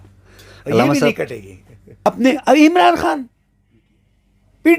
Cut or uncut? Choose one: cut